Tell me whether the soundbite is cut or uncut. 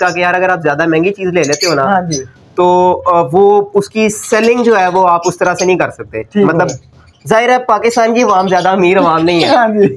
uncut